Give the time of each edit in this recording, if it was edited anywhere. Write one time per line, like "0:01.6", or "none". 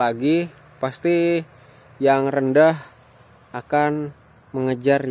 none